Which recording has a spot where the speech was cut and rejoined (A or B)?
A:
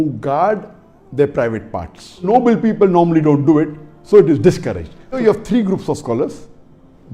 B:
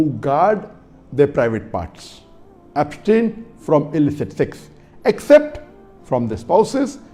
A